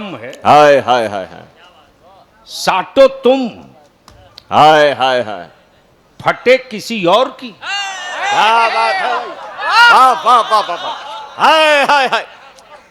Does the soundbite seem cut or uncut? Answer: uncut